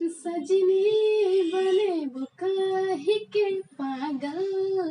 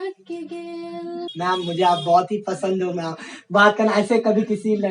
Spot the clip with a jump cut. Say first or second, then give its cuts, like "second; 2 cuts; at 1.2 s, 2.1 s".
second; 1 cut; at 1.2 s